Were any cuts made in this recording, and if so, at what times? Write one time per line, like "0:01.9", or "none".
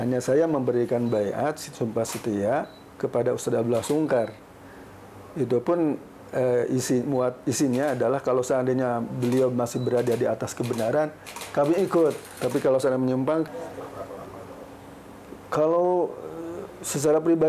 0:13.5